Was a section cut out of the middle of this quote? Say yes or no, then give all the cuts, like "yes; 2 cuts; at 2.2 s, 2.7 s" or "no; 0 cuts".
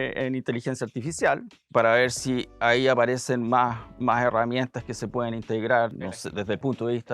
yes; 2 cuts; at 1.5 s, 6.1 s